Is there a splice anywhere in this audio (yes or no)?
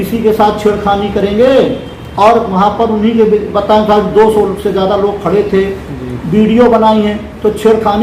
no